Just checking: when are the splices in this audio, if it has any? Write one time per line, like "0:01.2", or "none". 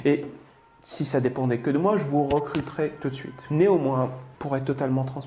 0:03.3
0:04.3